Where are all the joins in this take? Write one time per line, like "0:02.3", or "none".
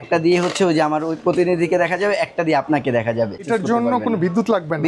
0:03.5